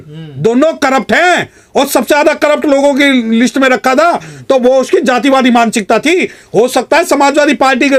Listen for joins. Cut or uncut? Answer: uncut